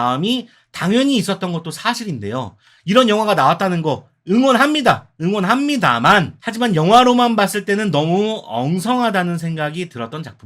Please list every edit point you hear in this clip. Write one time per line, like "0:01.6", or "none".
0:06.4

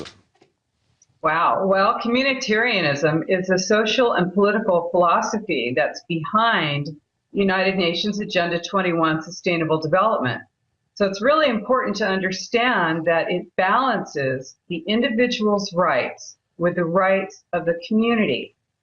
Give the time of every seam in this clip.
none

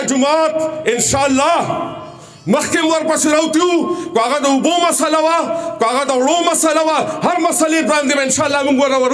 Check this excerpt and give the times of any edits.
none

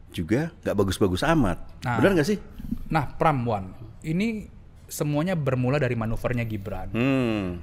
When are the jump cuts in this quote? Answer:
none

